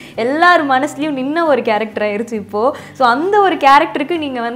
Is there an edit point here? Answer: no; 0 cuts

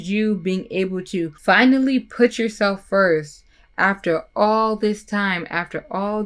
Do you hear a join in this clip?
yes; 1 cut; at 1.4 s

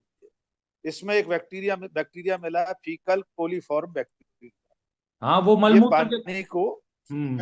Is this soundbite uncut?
yes; 0 cuts

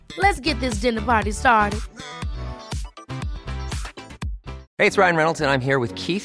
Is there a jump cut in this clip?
yes; 1 cut; at 4.6 s

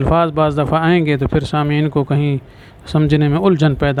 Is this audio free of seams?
yes; 0 cuts

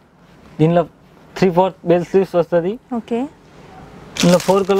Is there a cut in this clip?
no; 0 cuts

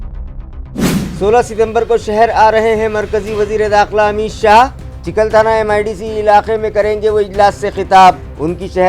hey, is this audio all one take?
no; 1 cut; at 1.0 s

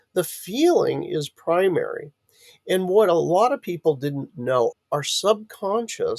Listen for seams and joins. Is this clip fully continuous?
no; 1 cut; at 4.7 s

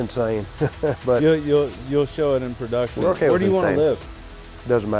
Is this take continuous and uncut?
yes; 0 cuts

